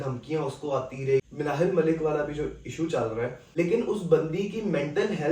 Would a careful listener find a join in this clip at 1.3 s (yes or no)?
yes